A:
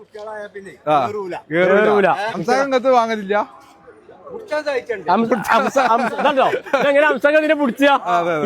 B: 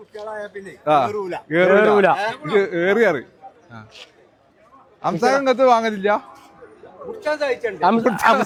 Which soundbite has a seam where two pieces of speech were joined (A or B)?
A